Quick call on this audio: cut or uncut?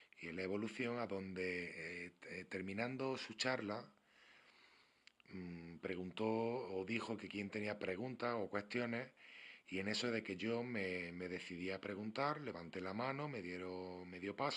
cut